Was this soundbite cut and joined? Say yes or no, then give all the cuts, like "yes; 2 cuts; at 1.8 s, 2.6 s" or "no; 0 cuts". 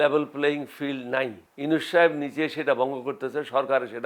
yes; 1 cut; at 1.4 s